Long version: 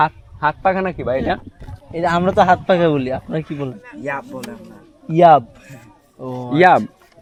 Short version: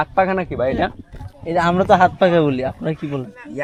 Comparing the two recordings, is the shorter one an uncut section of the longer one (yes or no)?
yes